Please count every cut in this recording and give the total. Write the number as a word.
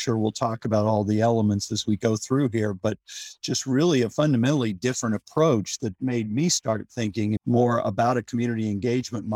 one